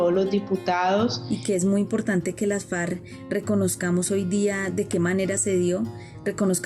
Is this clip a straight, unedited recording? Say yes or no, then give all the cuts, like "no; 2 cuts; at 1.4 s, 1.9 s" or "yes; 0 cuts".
no; 1 cut; at 1.2 s